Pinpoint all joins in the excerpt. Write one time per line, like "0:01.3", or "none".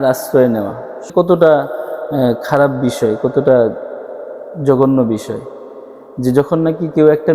0:01.1